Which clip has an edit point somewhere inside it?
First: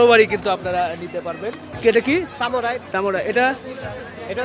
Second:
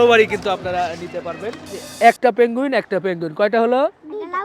second; 1 cut; at 1.8 s

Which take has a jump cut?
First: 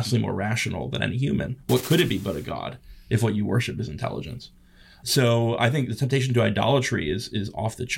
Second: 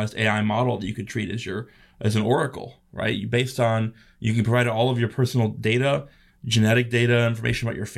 first; 1 cut; at 5.0 s

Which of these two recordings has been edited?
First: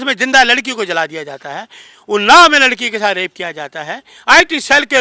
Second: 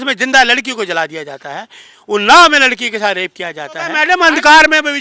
second; 1 cut; at 4.0 s

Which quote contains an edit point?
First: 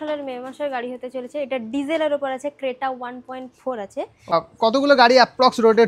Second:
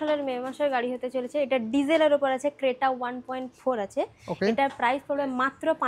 first; 1 cut; at 4.3 s

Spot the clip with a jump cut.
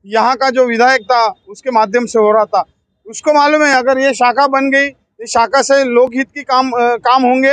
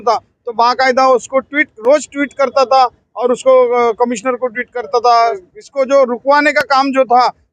second; 1 cut; at 5.4 s

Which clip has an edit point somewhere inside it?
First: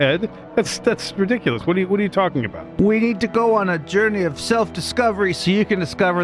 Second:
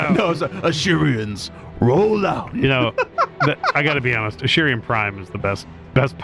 first; 1 cut; at 2.6 s

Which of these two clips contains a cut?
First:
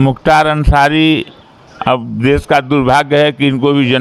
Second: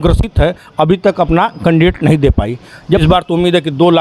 second; 1 cut; at 3.0 s

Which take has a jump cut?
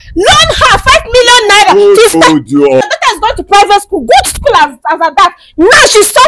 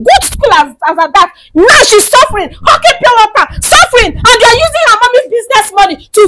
first; 1 cut; at 2.8 s

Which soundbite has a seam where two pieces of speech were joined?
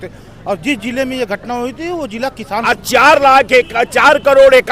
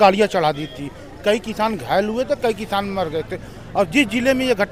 first; 1 cut; at 2.4 s

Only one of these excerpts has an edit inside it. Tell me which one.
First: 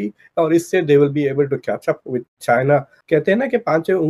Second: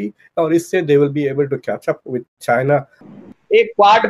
second; 1 cut; at 3.1 s

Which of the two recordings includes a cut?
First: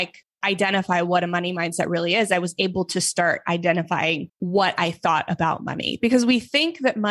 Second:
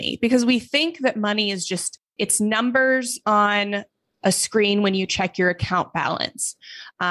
first; 1 cut; at 4.3 s

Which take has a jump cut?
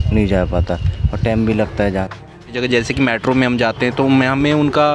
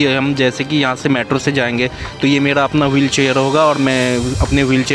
first; 1 cut; at 2.6 s

